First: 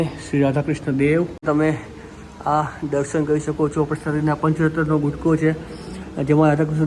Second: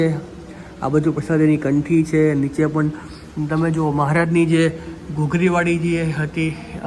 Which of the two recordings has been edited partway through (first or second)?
first